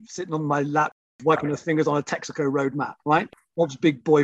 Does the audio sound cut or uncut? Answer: cut